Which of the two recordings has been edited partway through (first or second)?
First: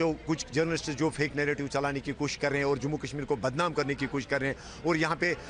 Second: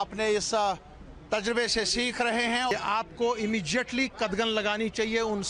second